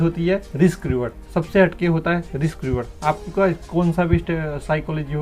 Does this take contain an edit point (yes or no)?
no